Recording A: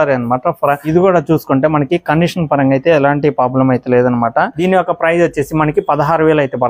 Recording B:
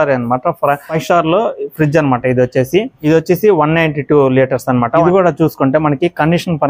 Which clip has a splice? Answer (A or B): A